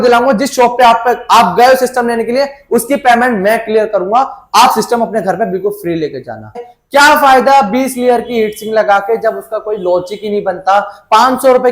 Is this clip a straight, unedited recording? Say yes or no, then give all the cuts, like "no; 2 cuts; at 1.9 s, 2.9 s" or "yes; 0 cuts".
no; 1 cut; at 6.7 s